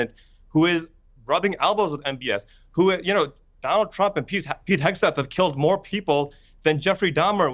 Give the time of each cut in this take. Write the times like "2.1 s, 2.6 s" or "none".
none